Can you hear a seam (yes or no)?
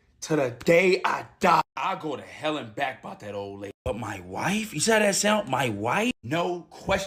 no